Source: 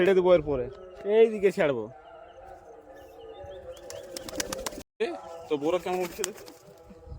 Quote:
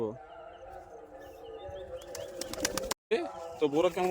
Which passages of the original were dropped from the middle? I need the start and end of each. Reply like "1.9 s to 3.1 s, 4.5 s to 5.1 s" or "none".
4.8 s to 4.9 s